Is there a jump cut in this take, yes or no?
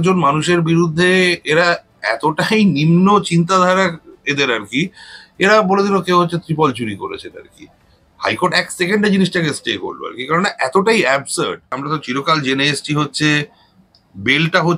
yes